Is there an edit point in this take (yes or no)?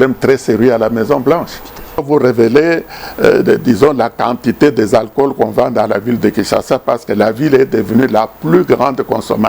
yes